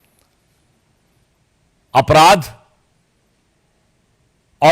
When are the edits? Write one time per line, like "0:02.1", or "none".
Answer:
none